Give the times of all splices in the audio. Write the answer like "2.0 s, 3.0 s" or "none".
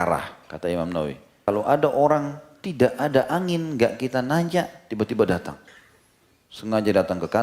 1.4 s